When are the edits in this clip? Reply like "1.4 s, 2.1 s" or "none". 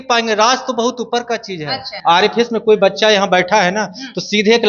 1.9 s